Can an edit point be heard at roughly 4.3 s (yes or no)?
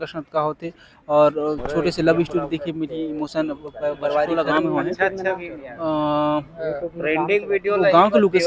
yes